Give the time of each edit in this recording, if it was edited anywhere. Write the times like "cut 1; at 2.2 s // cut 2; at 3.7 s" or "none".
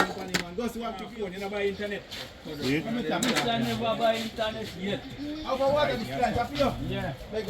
cut 1; at 1.1 s